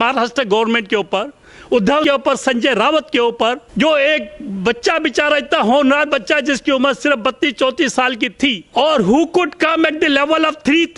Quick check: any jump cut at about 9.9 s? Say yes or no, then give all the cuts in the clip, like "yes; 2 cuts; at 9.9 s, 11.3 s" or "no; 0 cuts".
no; 3 cuts; at 2.0 s, 3.6 s, 8.6 s